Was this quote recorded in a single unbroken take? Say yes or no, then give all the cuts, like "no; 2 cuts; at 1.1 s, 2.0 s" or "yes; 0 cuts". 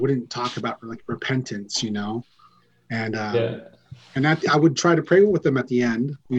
yes; 0 cuts